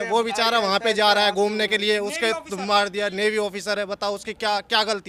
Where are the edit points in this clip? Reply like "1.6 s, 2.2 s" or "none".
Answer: none